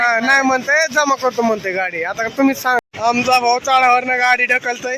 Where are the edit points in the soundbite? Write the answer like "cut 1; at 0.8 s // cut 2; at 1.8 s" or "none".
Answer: cut 1; at 2.8 s

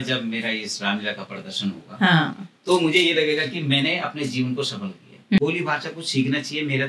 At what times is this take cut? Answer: cut 1; at 5.4 s

